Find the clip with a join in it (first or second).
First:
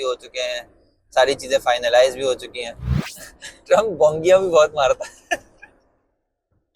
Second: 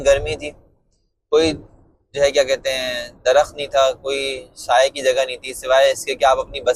first